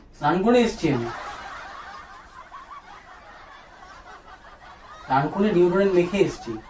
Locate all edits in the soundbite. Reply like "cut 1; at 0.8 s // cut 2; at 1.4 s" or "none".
none

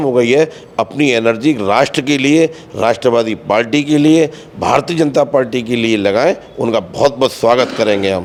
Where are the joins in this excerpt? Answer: none

